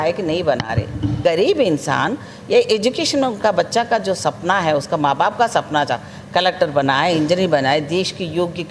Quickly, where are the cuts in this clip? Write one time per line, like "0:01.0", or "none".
0:01.2